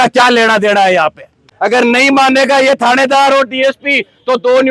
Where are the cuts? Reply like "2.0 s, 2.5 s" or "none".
1.4 s